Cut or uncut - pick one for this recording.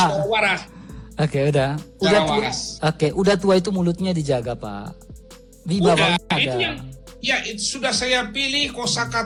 uncut